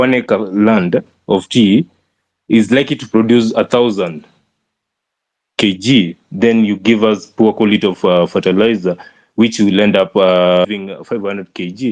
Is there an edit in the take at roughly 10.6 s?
yes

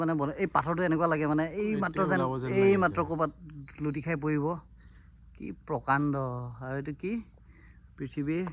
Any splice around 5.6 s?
no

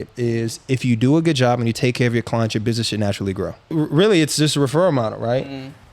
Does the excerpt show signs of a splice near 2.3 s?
no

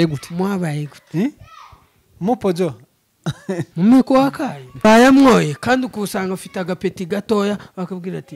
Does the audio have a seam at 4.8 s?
yes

